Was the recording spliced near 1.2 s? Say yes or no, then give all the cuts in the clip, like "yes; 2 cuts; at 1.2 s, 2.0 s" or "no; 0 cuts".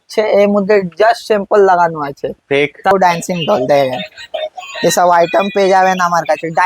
no; 1 cut; at 2.9 s